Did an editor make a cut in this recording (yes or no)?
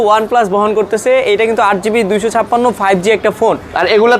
no